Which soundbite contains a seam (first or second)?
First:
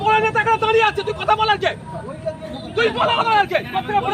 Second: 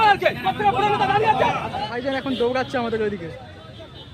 second